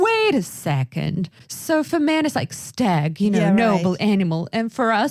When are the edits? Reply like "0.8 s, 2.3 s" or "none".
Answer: none